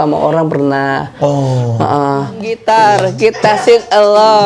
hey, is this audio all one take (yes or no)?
no